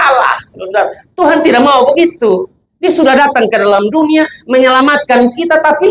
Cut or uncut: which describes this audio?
uncut